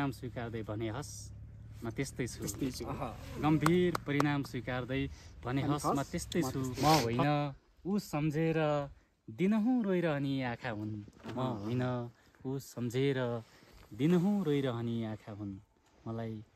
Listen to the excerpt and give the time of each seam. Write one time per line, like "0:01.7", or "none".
0:06.7